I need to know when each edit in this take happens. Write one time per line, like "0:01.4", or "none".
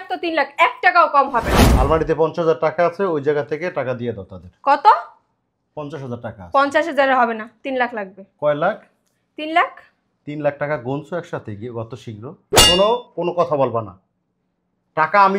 0:01.6
0:12.5